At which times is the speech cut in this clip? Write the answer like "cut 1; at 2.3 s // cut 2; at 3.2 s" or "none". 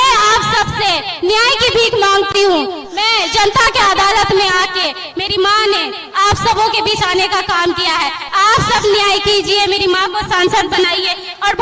none